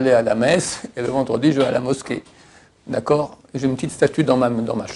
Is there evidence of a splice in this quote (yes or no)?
no